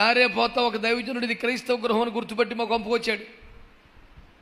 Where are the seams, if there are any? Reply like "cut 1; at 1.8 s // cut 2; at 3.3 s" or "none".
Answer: none